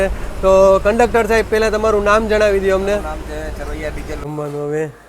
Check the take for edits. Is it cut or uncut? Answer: cut